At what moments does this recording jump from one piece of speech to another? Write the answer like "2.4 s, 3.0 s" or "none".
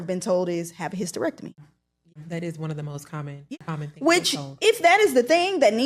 2.2 s, 3.6 s